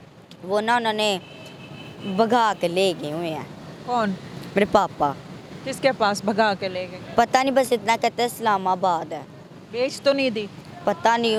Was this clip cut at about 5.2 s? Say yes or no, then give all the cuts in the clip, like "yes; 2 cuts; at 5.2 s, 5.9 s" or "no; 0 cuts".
no; 0 cuts